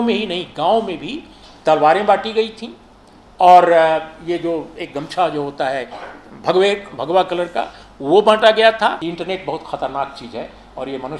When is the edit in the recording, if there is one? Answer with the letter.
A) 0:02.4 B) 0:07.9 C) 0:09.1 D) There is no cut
C